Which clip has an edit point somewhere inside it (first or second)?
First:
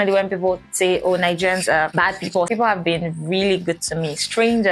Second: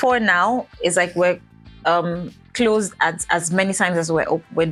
first